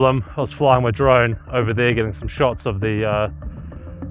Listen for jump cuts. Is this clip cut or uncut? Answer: uncut